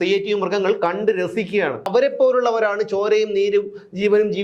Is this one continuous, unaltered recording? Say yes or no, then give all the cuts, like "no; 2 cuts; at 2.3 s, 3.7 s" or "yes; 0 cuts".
no; 1 cut; at 1.9 s